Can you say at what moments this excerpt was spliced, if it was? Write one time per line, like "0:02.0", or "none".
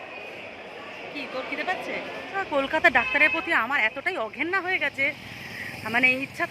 0:02.4